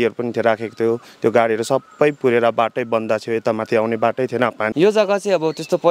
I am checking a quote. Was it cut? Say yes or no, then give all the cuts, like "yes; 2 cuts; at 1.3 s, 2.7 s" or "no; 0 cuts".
yes; 1 cut; at 4.7 s